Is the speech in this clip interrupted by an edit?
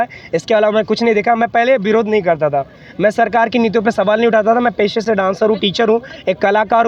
no; 0 cuts

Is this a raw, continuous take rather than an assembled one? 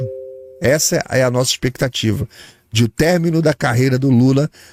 yes; 0 cuts

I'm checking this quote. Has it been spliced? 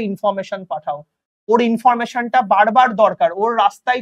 no; 0 cuts

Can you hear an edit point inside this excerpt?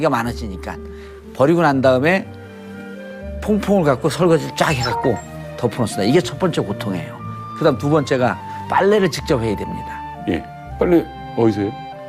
yes; 1 cut; at 5.7 s

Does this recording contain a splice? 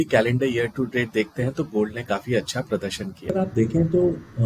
yes; 1 cut; at 3.3 s

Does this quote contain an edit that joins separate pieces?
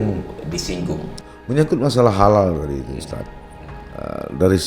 yes; 1 cut; at 1.2 s

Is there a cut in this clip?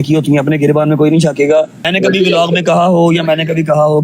yes; 1 cut; at 1.8 s

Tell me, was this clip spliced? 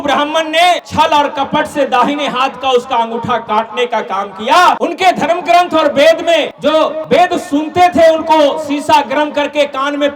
yes; 3 cuts; at 0.8 s, 4.8 s, 7.0 s

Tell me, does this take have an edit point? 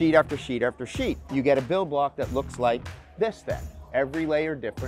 yes; 1 cut; at 1.2 s

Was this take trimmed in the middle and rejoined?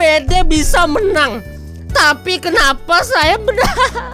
no; 0 cuts

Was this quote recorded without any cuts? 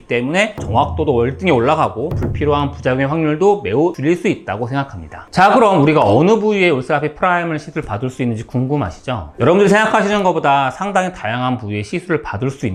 yes; 0 cuts

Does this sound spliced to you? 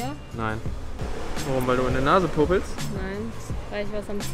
no; 0 cuts

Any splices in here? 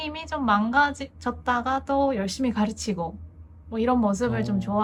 no; 0 cuts

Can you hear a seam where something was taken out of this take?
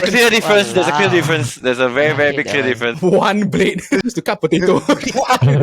yes; 2 cuts; at 2.9 s, 4.0 s

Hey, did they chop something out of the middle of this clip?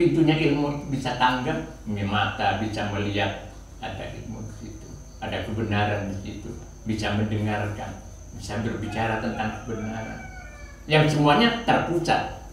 no; 0 cuts

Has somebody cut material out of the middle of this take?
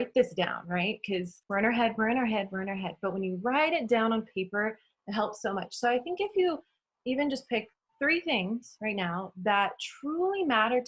yes; 1 cut; at 1.4 s

